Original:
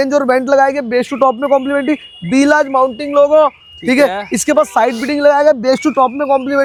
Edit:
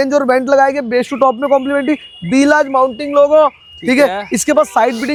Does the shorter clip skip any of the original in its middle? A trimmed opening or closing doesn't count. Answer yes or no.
no